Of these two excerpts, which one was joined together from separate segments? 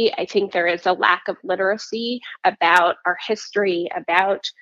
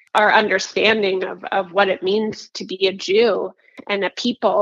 second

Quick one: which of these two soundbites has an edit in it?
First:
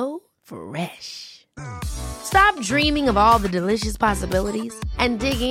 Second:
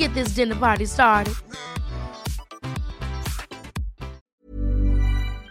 second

